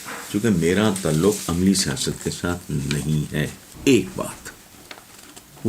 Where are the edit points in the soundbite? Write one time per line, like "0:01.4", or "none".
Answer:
0:03.6